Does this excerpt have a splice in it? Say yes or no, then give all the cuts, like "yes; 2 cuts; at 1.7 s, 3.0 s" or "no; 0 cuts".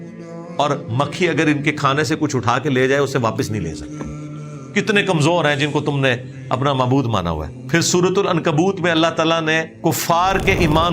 yes; 2 cuts; at 7.5 s, 9.7 s